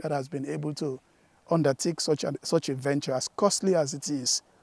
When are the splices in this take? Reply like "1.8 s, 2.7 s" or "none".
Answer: none